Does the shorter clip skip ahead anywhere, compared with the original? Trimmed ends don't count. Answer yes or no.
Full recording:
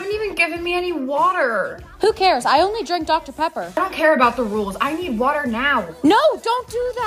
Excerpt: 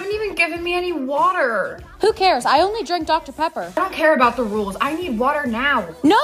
no